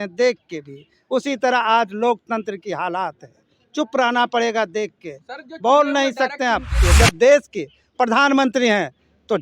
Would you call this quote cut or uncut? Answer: cut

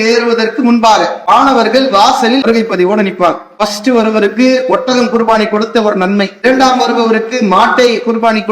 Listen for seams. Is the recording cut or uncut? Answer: cut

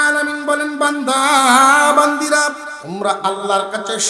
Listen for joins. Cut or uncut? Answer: cut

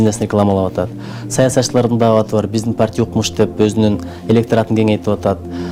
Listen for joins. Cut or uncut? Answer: uncut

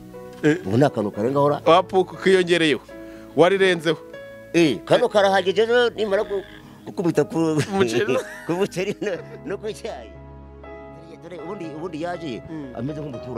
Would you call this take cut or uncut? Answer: cut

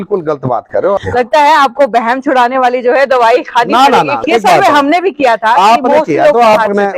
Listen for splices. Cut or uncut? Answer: cut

